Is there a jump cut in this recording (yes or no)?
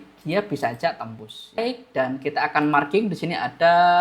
yes